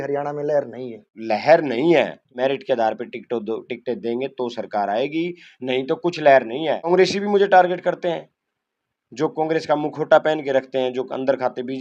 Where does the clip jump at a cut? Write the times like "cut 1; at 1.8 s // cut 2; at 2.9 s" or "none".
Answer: cut 1; at 1.2 s // cut 2; at 2.2 s // cut 3; at 6.8 s

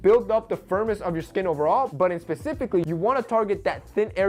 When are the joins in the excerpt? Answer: none

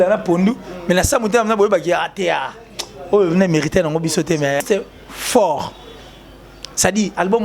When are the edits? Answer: cut 1; at 4.6 s

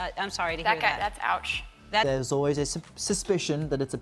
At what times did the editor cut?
cut 1; at 2.0 s

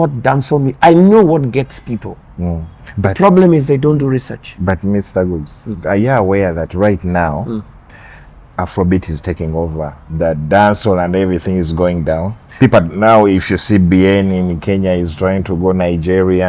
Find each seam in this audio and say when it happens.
none

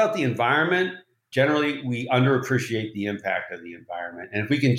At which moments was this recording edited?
cut 1; at 1.2 s

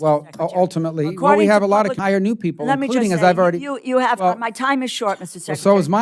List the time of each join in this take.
cut 1; at 2.0 s

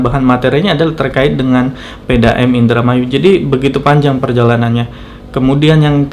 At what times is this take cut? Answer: none

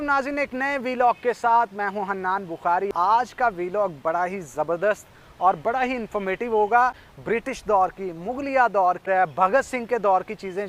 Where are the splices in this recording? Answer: cut 1; at 2.9 s // cut 2; at 7.0 s // cut 3; at 9.0 s

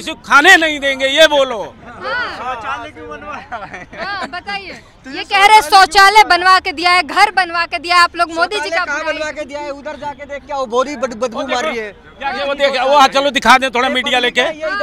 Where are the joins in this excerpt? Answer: none

